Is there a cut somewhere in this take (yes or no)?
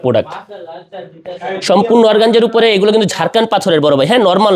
no